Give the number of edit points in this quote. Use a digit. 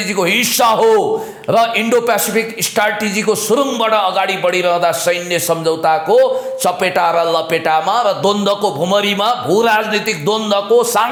0